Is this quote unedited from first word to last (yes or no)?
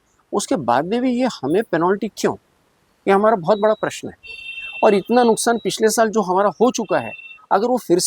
yes